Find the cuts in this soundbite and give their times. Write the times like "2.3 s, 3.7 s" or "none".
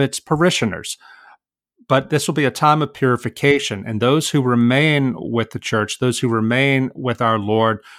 none

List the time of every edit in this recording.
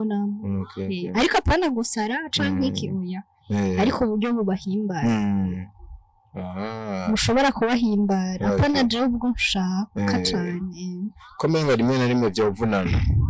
none

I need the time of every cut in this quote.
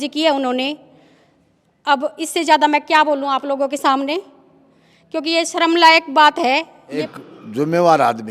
6.8 s

